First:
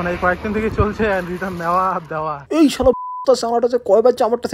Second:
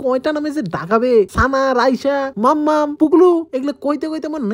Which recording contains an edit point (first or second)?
second